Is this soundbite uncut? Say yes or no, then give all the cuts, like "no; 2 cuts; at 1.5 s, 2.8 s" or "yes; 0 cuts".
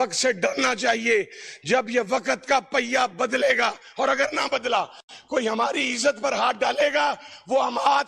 yes; 0 cuts